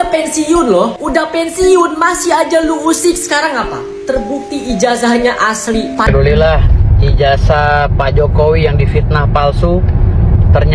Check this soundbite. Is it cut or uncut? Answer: cut